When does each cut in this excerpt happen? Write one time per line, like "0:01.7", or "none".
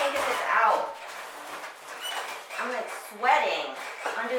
none